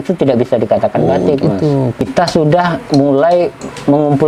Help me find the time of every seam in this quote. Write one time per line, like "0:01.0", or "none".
0:02.0